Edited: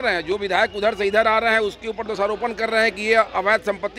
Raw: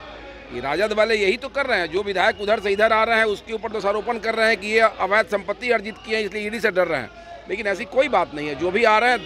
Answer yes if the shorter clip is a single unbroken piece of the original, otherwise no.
yes